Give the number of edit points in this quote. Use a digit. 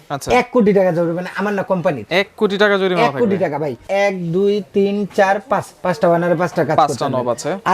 1